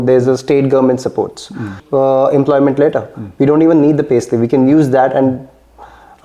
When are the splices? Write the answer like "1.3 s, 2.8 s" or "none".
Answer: 1.8 s